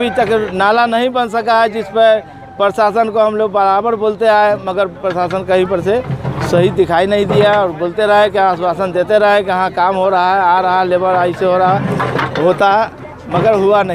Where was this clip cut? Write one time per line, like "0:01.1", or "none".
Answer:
none

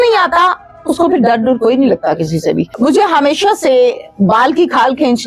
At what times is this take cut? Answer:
0:02.7

